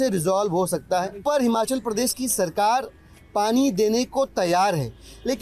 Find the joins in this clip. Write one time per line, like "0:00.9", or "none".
0:01.2